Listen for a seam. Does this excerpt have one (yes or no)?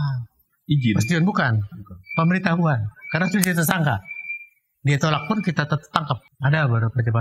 yes